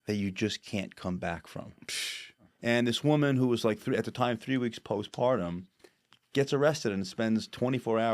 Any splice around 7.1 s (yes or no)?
no